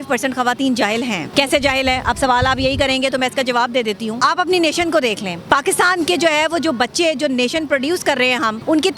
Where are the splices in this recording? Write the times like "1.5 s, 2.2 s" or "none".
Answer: none